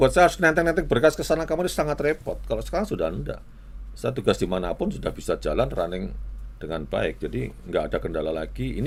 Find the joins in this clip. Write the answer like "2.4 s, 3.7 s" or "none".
none